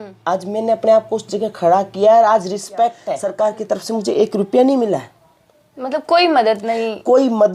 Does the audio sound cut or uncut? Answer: cut